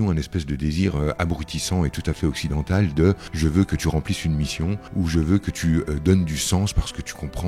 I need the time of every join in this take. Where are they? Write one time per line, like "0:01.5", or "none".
0:03.3
0:04.8